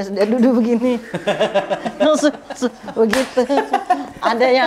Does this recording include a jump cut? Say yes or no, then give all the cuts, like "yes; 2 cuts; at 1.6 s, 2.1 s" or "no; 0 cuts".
no; 0 cuts